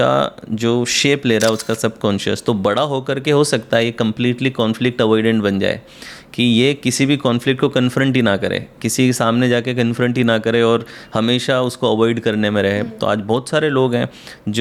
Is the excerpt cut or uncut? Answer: uncut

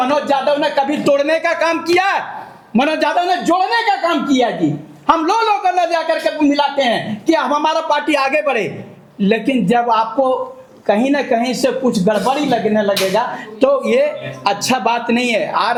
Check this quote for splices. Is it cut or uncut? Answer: uncut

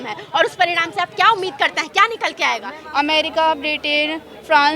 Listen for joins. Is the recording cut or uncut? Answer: cut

